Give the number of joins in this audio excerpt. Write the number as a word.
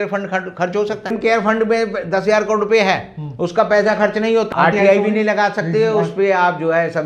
one